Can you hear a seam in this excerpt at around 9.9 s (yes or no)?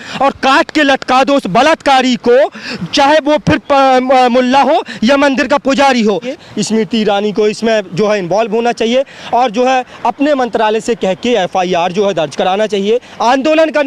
no